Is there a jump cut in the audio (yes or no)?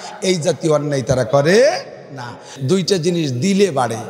yes